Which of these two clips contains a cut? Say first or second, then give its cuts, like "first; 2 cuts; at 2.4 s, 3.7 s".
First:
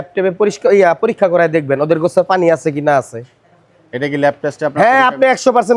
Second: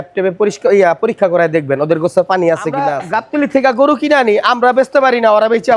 second; 1 cut; at 3.0 s